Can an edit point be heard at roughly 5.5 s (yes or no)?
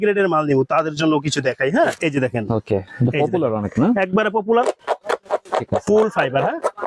no